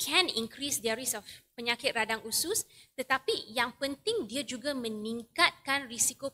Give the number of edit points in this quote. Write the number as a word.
zero